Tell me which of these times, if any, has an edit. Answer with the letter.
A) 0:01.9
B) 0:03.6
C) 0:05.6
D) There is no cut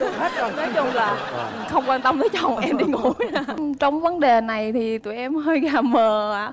B